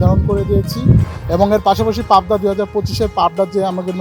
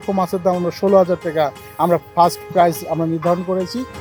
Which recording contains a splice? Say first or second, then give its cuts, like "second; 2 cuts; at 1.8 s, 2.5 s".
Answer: first; 1 cut; at 1.1 s